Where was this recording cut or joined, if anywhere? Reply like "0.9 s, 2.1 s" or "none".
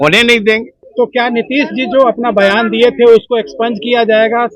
0.9 s